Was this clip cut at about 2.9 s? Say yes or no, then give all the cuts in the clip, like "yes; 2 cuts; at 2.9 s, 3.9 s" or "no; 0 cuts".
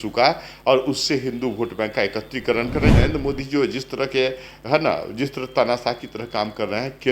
yes; 1 cut; at 2.9 s